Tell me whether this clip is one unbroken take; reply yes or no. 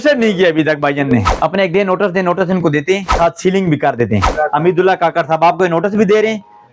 no